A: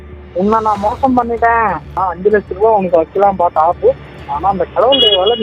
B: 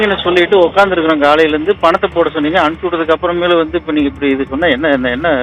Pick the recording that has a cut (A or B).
A